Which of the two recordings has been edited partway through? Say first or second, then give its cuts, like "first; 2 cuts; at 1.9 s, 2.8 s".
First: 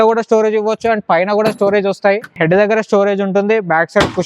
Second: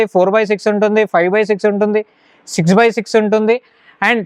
first; 1 cut; at 2.3 s